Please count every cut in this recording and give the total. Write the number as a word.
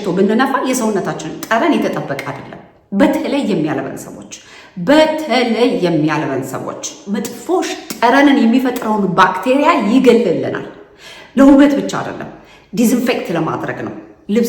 two